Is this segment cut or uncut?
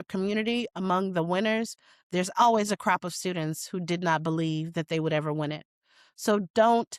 uncut